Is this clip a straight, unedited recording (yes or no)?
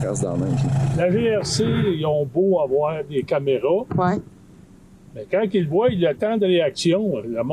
no